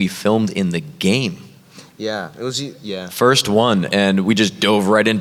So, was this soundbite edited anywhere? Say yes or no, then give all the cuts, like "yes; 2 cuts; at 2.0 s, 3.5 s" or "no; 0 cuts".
no; 0 cuts